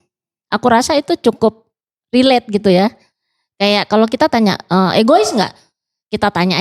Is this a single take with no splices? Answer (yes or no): yes